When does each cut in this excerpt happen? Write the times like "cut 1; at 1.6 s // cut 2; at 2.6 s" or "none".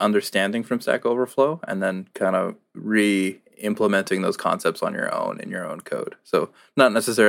cut 1; at 2.7 s